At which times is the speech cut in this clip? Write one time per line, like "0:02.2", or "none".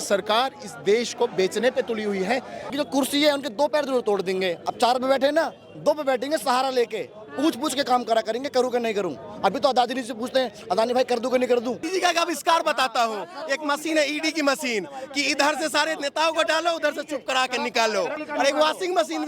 0:02.7
0:11.8
0:18.2